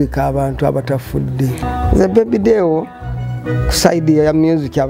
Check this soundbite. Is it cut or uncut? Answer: cut